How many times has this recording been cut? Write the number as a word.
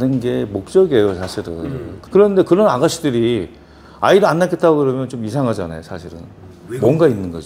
one